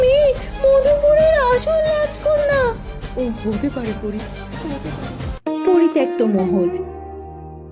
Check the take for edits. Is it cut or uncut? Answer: cut